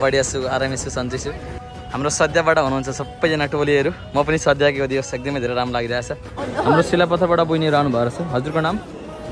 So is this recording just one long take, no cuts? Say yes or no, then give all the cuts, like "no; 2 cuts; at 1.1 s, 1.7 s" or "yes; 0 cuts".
no; 2 cuts; at 1.7 s, 6.4 s